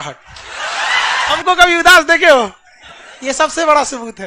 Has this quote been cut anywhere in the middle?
yes; 1 cut; at 1.4 s

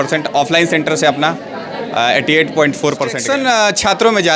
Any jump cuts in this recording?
yes; 1 cut; at 3.2 s

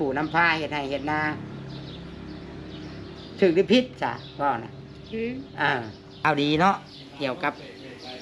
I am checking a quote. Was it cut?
yes; 1 cut; at 6.2 s

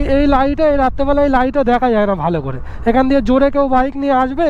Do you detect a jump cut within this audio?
no; 0 cuts

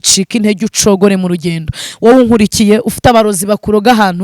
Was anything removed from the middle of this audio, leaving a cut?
yes; 1 cut; at 1.8 s

